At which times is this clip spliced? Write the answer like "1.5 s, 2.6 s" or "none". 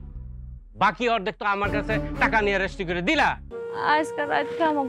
3.6 s